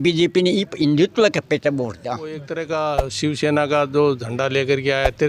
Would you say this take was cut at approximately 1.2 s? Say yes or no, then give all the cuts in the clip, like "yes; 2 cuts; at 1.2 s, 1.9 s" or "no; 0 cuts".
no; 1 cut; at 2.5 s